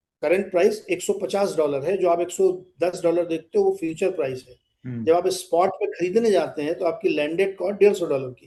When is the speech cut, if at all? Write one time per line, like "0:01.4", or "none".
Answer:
none